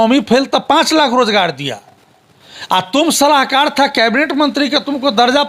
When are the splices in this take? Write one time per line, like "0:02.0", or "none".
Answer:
none